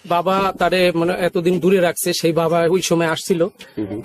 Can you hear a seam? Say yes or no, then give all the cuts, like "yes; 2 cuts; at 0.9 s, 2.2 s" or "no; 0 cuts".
no; 0 cuts